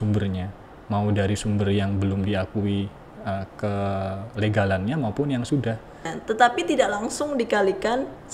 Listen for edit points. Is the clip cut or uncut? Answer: cut